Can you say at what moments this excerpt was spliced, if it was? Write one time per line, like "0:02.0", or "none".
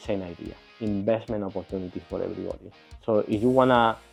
none